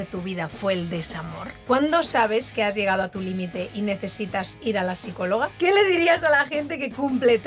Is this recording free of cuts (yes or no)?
no